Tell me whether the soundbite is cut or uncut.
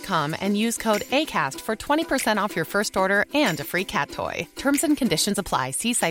uncut